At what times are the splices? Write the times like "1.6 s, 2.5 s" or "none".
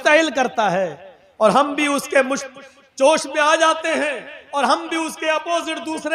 none